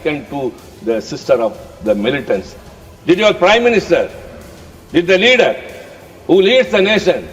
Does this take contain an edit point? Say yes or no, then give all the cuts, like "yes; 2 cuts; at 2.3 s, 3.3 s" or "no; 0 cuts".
yes; 1 cut; at 2.5 s